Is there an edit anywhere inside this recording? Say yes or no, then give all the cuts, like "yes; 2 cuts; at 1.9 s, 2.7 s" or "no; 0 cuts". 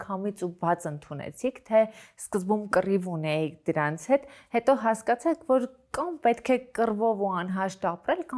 no; 0 cuts